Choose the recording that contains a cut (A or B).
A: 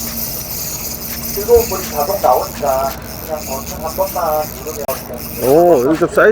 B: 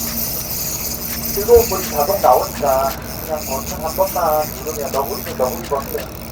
A